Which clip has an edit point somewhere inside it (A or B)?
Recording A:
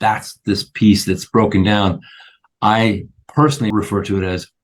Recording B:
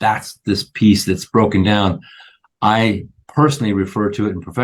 A